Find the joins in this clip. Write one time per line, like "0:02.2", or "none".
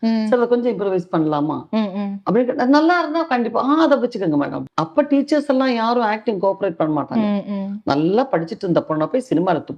0:04.6